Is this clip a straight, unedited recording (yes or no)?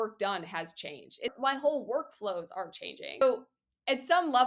no